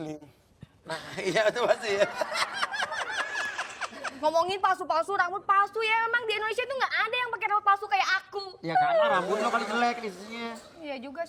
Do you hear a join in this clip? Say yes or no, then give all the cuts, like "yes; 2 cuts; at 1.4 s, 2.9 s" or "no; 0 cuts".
no; 0 cuts